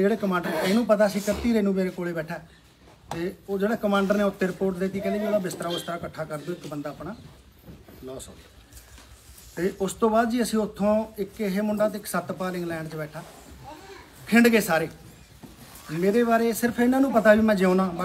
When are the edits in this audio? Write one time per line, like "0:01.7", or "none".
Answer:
0:04.5